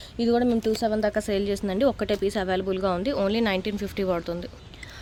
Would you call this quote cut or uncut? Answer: uncut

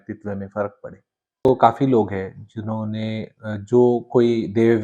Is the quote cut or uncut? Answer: cut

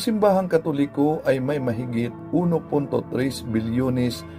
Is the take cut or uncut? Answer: cut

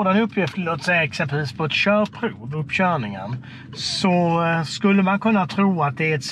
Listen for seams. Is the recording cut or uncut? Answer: uncut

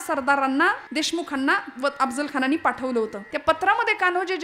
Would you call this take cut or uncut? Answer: cut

